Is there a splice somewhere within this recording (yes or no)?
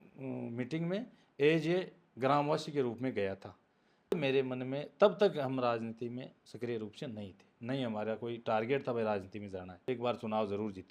yes